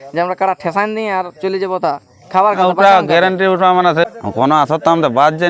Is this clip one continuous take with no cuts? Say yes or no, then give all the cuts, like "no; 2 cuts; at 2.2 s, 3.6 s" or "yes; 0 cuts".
no; 1 cut; at 4.1 s